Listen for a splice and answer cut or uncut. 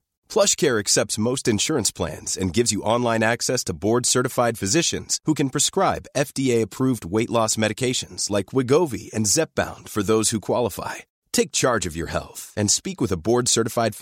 uncut